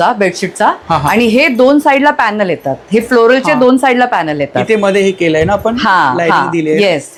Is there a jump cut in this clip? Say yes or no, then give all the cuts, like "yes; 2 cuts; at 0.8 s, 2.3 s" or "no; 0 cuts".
no; 0 cuts